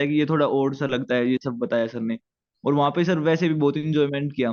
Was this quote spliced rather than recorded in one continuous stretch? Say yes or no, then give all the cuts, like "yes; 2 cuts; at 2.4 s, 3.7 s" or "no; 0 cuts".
no; 0 cuts